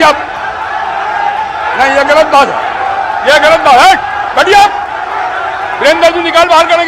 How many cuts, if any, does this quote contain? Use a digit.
0